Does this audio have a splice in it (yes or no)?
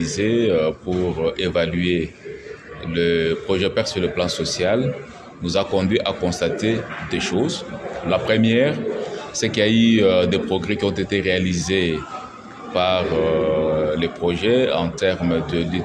no